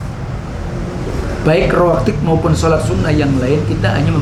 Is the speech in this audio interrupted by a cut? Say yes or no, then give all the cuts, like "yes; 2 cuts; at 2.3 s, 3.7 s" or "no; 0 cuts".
no; 0 cuts